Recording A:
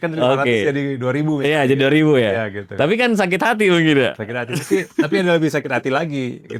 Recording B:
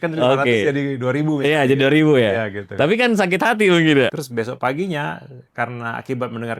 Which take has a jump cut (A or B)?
B